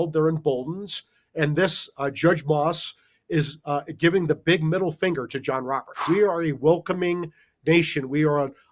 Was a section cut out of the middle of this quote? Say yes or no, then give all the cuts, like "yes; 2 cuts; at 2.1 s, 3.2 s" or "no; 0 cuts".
yes; 1 cut; at 6.0 s